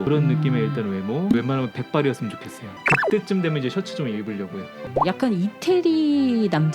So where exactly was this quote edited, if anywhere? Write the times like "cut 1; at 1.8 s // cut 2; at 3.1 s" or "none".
cut 1; at 2.7 s // cut 2; at 4.8 s